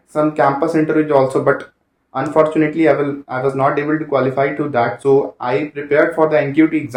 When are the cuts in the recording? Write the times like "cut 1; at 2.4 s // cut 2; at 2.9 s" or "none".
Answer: none

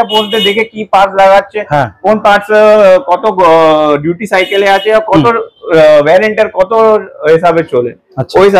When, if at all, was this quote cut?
none

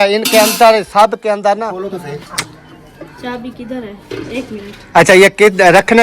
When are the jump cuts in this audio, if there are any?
cut 1; at 1.8 s

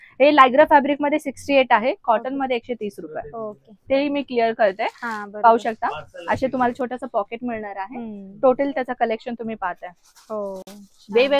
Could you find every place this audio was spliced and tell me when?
none

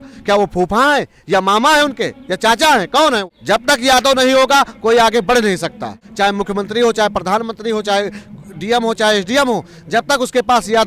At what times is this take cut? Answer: cut 1; at 3.3 s // cut 2; at 6.0 s

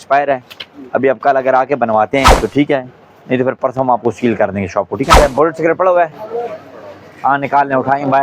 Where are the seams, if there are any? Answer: cut 1; at 2.3 s // cut 2; at 5.1 s

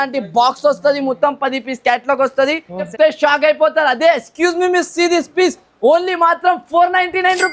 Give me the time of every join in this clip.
cut 1; at 2.9 s

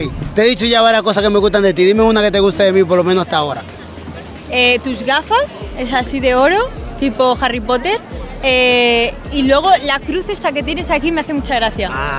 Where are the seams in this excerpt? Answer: none

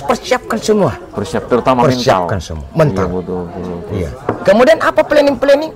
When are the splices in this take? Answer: none

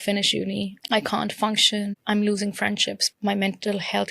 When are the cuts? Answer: cut 1; at 0.8 s // cut 2; at 2.0 s // cut 3; at 3.0 s

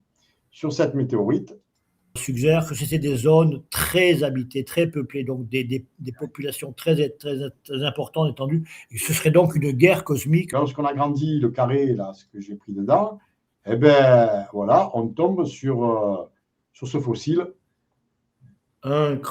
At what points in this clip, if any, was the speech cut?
cut 1; at 2.2 s // cut 2; at 10.5 s

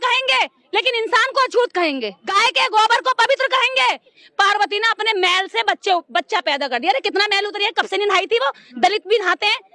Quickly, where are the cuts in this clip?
cut 1; at 2.4 s // cut 2; at 4.2 s

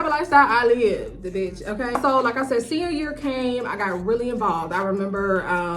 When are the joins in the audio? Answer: none

